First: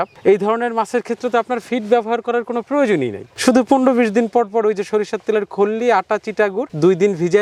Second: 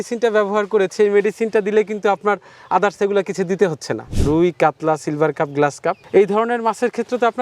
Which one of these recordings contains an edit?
second; 1 cut; at 4.1 s

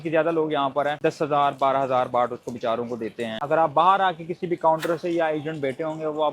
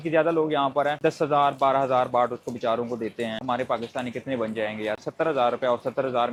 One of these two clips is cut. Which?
first; 1 cut; at 3.4 s

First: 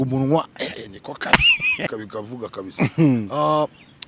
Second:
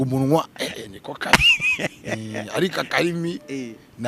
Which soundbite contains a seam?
first; 1 cut; at 1.9 s

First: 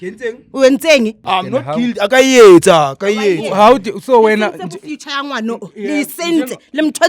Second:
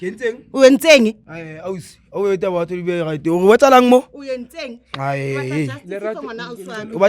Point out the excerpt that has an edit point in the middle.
first; 1 cut; at 1.2 s

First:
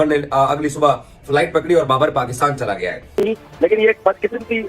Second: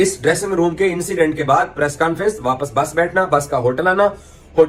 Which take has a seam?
first; 1 cut; at 3.1 s

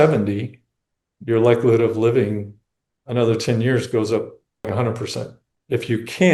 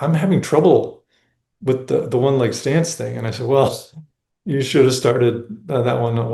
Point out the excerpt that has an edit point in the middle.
first; 1 cut; at 5.0 s

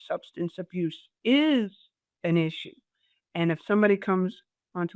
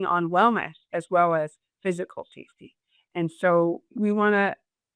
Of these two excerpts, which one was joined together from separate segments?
second; 1 cut; at 3.9 s

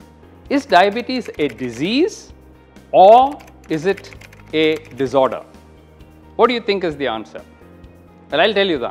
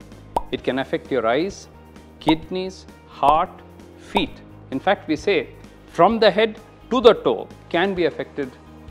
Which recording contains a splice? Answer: second; 1 cut; at 7.5 s

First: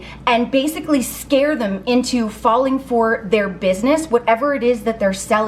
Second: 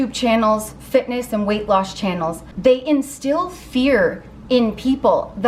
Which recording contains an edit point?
second; 1 cut; at 2.4 s

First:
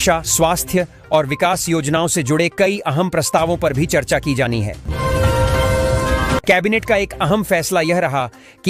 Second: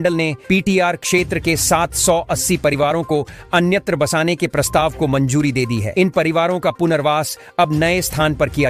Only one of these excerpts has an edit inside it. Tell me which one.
first; 2 cuts; at 4.9 s, 6.4 s

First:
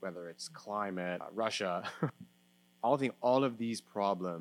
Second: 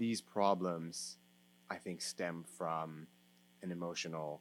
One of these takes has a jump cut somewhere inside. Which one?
first; 2 cuts; at 1.3 s, 2.2 s

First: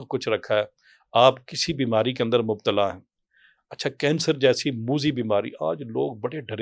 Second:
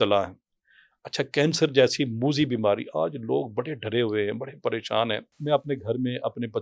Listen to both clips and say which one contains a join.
second; 1 cut; at 5.3 s

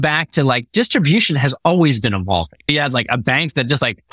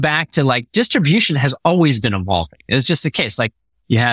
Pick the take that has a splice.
first; 1 cut; at 2.7 s

